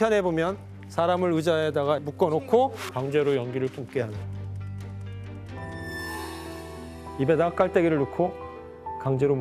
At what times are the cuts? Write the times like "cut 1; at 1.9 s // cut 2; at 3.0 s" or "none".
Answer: cut 1; at 5.6 s